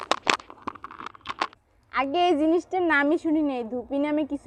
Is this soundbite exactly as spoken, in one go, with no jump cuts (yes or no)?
no